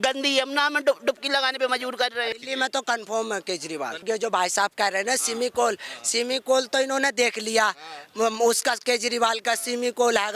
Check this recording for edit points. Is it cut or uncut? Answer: cut